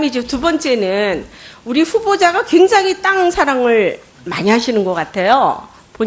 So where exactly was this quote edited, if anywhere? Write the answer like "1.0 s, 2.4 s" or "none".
1.4 s